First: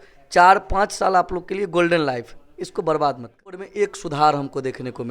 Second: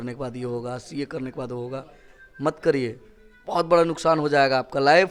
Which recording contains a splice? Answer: first; 1 cut; at 3.6 s

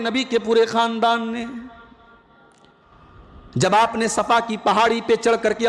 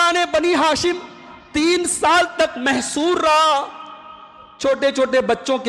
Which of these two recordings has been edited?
first; 1 cut; at 2.8 s

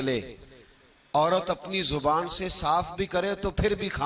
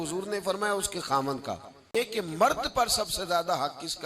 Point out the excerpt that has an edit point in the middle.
second; 1 cut; at 1.8 s

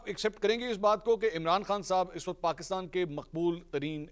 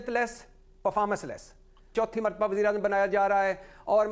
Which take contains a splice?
second; 1 cut; at 1.9 s

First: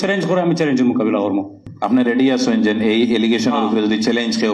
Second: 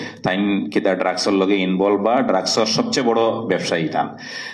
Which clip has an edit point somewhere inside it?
first; 1 cut; at 1.6 s

